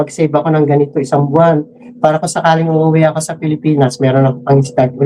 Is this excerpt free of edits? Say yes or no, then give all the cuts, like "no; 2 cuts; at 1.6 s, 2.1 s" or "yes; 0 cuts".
yes; 0 cuts